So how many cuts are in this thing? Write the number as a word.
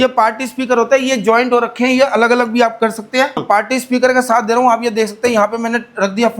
one